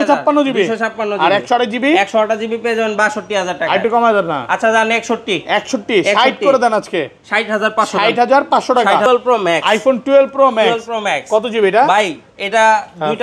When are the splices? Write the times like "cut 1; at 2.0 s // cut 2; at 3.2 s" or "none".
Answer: cut 1; at 9.1 s